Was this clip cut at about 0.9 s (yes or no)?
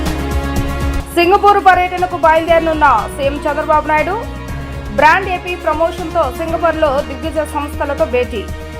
yes